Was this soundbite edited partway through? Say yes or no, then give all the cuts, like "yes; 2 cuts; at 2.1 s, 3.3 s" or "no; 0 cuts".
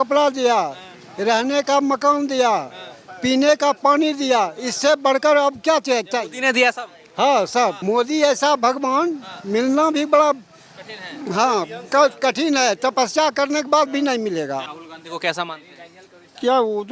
yes; 2 cuts; at 7.8 s, 14.7 s